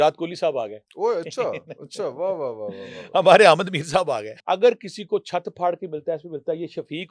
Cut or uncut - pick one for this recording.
cut